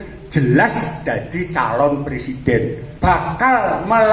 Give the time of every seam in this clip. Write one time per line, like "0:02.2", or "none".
0:02.8